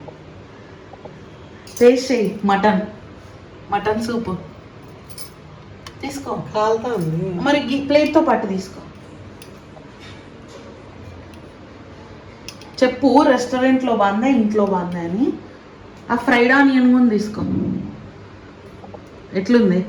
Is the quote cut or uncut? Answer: uncut